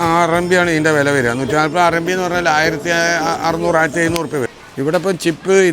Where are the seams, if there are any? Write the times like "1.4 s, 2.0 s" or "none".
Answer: 4.6 s